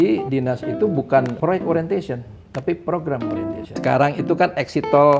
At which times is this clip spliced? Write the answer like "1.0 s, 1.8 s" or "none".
1.3 s, 3.8 s